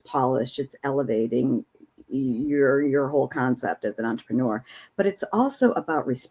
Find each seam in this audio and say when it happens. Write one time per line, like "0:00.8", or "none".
none